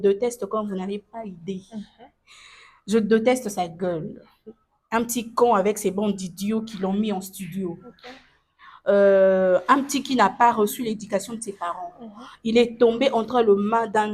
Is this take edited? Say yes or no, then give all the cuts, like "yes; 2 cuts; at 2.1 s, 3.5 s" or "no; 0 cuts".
no; 0 cuts